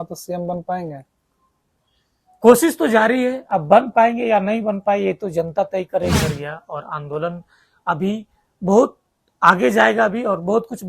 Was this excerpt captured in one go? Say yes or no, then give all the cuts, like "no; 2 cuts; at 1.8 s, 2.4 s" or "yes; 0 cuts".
no; 1 cut; at 6.2 s